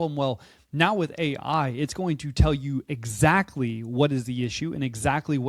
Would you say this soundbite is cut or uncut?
uncut